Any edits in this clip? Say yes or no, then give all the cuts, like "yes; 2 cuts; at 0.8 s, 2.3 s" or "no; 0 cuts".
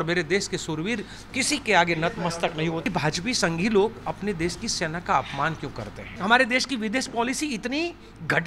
yes; 2 cuts; at 2.9 s, 6.1 s